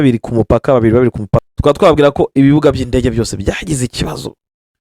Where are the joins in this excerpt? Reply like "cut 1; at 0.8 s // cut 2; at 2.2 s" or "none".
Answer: cut 1; at 1.4 s